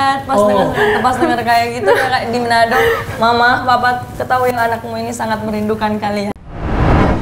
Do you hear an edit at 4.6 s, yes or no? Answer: no